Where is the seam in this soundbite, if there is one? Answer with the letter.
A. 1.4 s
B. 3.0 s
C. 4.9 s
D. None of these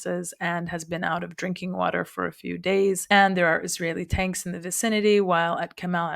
B